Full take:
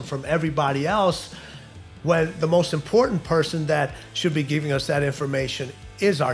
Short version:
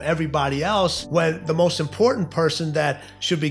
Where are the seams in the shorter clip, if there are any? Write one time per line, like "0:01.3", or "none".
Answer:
0:01.0